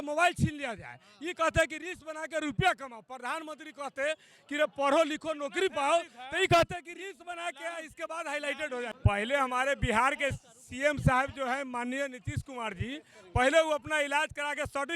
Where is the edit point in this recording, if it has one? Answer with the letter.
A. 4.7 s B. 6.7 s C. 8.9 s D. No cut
C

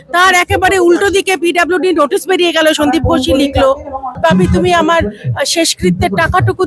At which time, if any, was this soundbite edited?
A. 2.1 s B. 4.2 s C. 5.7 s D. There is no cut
B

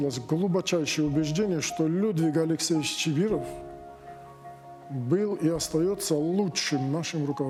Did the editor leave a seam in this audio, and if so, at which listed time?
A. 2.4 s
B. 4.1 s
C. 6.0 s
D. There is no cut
D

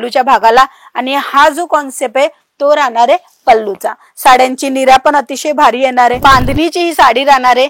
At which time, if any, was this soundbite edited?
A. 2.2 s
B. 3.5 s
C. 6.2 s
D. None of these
C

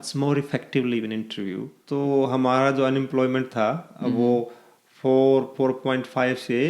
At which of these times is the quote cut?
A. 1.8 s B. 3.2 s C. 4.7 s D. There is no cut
A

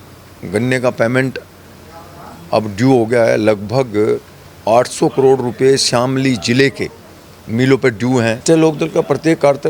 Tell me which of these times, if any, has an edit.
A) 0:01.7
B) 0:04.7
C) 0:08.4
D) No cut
C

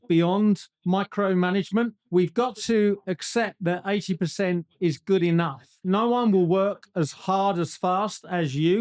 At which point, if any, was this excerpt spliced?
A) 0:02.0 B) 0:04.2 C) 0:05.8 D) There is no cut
C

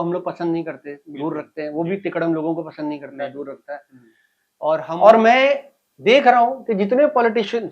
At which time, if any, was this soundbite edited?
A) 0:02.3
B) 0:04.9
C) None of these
B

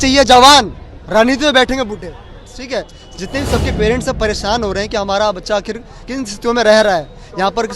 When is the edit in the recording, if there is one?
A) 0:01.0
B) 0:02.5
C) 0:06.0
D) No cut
B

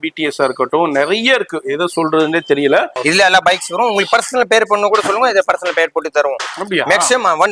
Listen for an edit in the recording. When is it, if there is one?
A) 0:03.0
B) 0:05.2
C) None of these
A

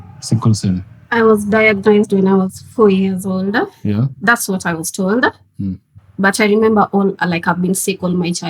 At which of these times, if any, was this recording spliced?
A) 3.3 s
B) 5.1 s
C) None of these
C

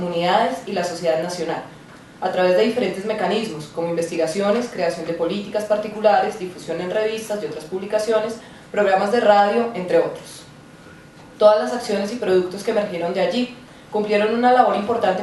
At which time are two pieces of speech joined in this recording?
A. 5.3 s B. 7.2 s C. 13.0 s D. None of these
A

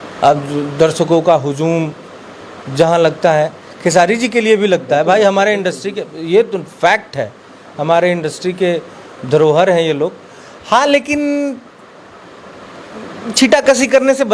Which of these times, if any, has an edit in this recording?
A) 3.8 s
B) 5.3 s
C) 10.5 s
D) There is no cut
D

